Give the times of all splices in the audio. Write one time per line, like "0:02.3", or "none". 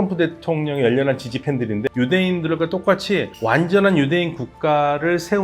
0:01.9